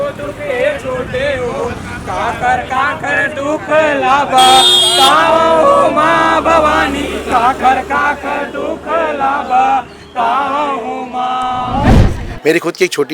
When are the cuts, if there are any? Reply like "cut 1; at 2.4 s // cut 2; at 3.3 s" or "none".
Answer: cut 1; at 11.9 s